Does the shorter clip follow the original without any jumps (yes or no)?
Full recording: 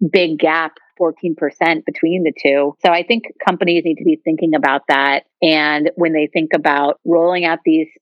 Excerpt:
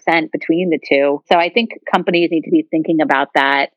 yes